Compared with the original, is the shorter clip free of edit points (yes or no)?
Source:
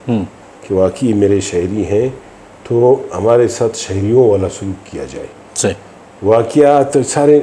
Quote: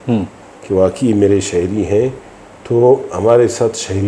yes